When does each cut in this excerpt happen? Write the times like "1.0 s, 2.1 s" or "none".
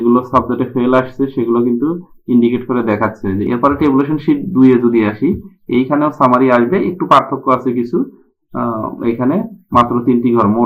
3.4 s